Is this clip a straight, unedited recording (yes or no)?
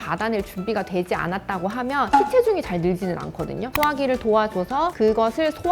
no